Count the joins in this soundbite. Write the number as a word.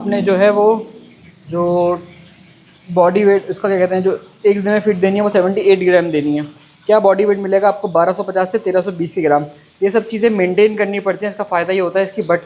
zero